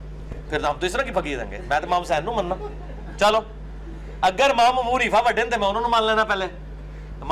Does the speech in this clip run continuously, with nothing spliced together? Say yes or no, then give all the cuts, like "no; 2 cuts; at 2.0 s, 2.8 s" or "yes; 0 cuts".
yes; 0 cuts